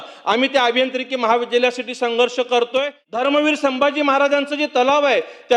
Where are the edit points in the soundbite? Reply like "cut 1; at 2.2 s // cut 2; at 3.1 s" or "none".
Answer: cut 1; at 3.0 s